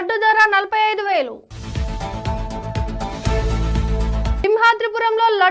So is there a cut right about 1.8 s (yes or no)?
no